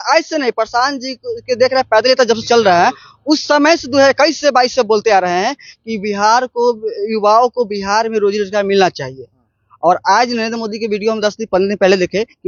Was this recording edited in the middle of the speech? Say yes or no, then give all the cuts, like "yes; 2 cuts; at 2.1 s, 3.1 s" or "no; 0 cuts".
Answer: no; 0 cuts